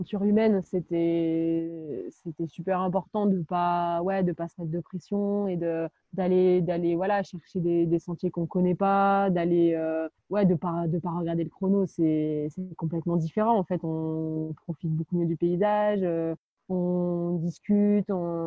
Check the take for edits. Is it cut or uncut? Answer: cut